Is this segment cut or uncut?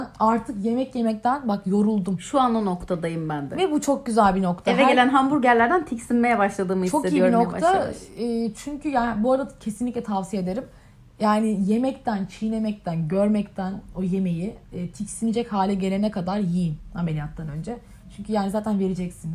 uncut